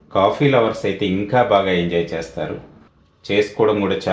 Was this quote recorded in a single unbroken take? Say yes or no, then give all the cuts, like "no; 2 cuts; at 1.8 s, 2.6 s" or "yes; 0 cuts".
no; 1 cut; at 2.6 s